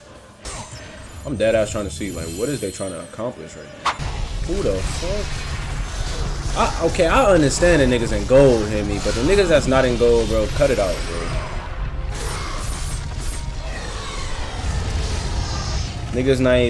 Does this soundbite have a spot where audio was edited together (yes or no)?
yes